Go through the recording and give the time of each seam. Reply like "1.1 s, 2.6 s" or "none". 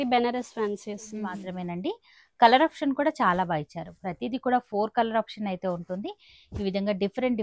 1.4 s